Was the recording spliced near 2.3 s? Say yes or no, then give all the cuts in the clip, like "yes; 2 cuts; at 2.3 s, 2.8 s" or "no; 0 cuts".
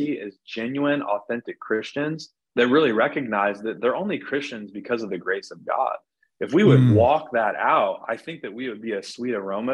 yes; 1 cut; at 2.3 s